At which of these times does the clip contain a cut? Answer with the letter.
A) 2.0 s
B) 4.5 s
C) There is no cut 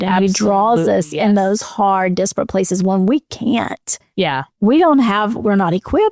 C